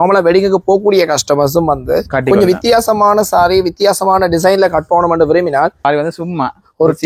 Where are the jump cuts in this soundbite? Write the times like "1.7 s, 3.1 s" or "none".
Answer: 5.8 s